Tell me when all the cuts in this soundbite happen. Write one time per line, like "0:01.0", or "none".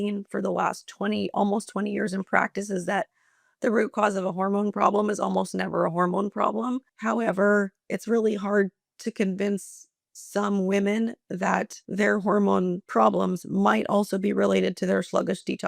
0:06.9
0:11.8
0:12.8

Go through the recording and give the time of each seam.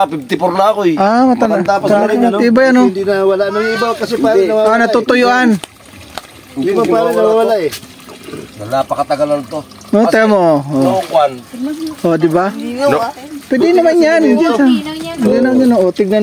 none

